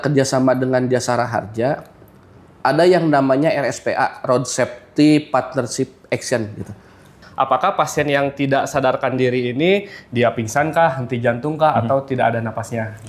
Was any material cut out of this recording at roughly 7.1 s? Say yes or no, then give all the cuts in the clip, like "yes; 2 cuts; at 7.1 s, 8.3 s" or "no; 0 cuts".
yes; 1 cut; at 7.1 s